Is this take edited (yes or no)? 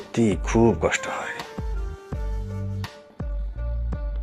no